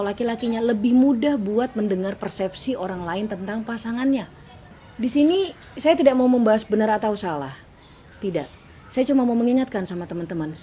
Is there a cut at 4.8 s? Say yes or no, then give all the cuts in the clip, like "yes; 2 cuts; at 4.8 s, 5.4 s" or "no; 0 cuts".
yes; 1 cut; at 4.8 s